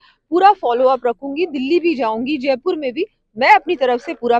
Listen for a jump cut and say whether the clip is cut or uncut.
uncut